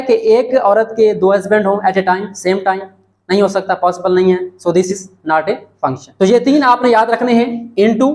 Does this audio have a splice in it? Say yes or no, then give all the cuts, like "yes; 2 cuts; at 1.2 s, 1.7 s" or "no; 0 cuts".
yes; 1 cut; at 6.1 s